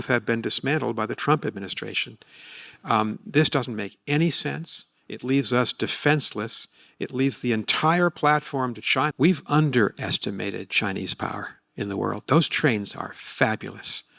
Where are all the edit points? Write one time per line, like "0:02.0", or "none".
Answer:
0:09.1